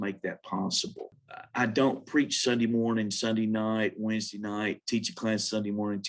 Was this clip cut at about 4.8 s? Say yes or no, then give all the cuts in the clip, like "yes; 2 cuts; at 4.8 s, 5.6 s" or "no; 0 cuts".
no; 1 cut; at 1.2 s